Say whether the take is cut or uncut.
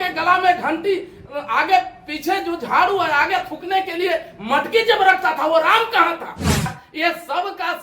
cut